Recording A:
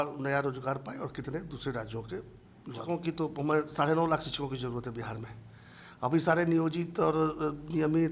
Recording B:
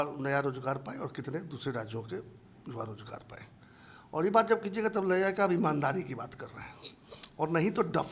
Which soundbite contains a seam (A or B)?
A